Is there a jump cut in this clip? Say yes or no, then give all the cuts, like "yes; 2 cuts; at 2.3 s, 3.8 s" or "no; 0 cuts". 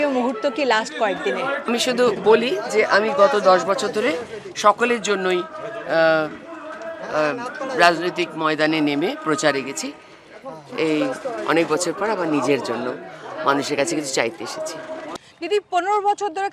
yes; 1 cut; at 15.0 s